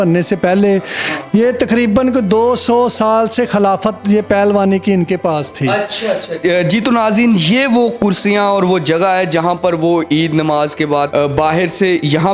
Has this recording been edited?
yes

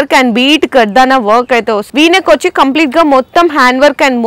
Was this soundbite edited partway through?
yes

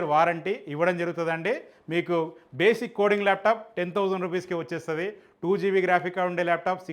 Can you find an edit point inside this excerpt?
no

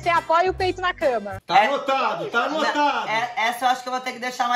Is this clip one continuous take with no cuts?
no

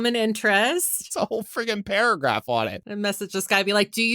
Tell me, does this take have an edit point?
yes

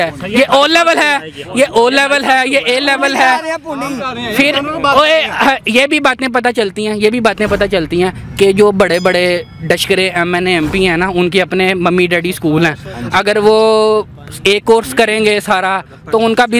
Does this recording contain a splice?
no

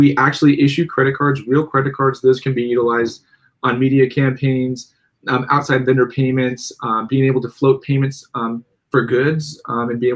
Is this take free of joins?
yes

